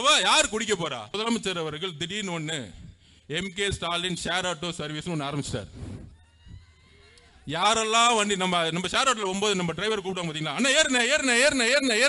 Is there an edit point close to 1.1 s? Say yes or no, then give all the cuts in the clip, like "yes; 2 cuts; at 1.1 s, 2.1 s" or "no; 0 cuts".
yes; 1 cut; at 1.1 s